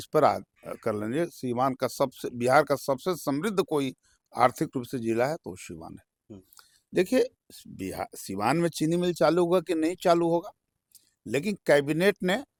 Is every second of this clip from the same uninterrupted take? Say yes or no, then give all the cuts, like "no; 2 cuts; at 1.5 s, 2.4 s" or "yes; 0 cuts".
yes; 0 cuts